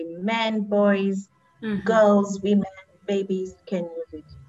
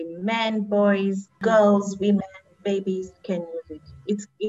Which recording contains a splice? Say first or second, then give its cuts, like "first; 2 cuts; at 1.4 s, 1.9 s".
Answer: second; 1 cut; at 1.3 s